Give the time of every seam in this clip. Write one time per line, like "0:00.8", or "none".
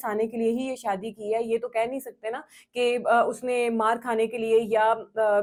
none